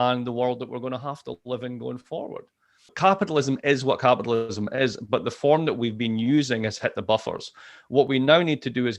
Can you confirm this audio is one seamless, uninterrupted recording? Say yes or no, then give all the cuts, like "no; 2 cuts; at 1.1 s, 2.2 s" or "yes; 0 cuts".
no; 1 cut; at 2.9 s